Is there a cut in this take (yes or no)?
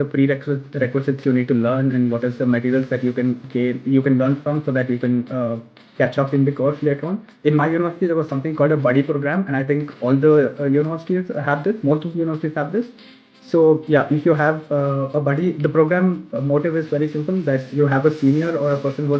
yes